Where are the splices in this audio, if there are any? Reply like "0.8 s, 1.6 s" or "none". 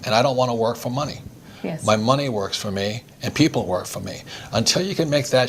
none